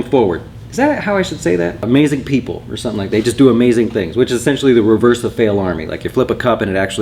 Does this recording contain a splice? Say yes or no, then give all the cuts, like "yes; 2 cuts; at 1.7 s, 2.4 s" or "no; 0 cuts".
yes; 1 cut; at 1.8 s